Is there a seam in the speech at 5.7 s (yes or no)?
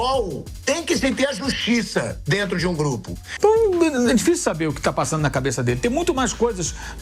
no